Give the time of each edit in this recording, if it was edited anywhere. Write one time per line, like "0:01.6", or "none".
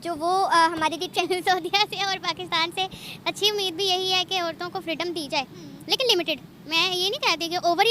0:01.2